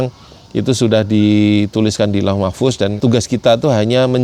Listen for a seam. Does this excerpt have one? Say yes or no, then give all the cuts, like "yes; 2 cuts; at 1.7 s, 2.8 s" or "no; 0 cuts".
yes; 1 cut; at 3.0 s